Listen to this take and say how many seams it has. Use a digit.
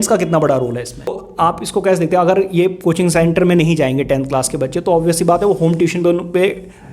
1